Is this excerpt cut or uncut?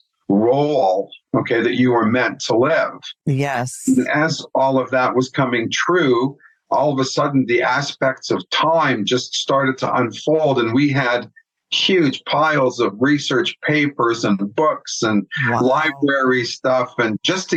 uncut